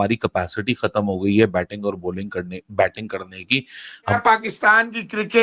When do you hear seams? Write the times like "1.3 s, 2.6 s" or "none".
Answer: 4.2 s